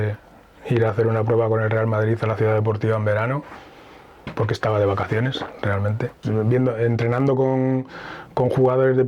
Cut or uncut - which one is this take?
cut